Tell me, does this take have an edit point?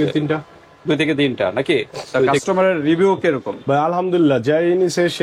yes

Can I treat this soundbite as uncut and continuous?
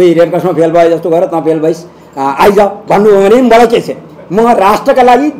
yes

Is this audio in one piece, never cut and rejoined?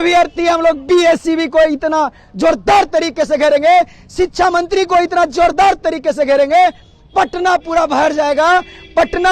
yes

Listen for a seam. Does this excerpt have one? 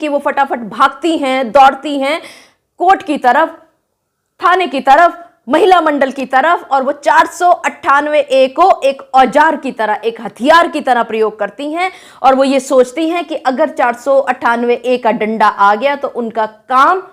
no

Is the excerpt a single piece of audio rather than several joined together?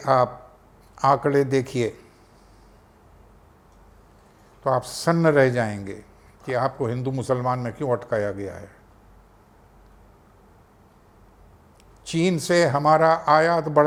yes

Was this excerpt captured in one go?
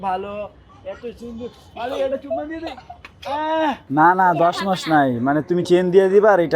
no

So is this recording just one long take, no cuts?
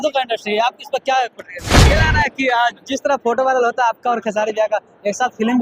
no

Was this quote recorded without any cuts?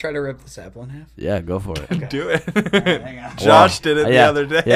yes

